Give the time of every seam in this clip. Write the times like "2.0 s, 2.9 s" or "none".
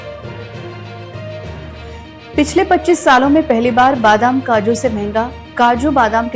1.6 s